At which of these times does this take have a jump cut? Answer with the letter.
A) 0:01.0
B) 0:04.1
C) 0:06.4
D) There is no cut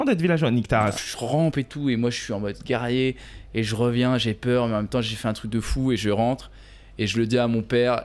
A